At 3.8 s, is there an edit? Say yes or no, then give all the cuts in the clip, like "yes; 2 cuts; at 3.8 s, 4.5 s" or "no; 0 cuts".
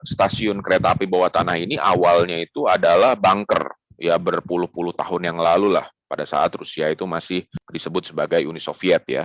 no; 0 cuts